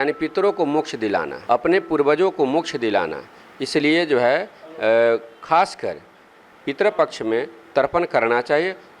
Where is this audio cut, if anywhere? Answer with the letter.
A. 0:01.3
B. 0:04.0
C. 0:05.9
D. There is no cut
A